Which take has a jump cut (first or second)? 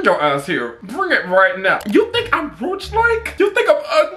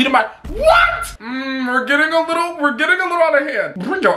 second